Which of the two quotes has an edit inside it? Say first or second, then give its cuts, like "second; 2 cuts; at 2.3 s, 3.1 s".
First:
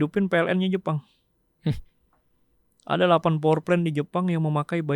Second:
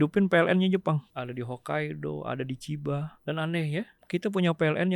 second; 3 cuts; at 1.1 s, 3.1 s, 4.0 s